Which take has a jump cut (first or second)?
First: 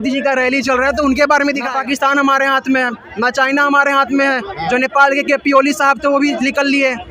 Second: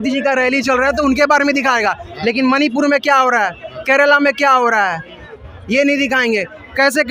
first